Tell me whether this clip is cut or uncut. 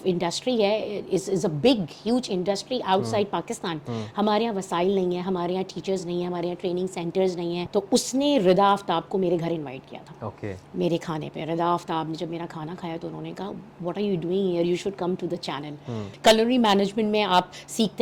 cut